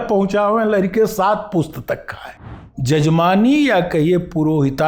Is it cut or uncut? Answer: cut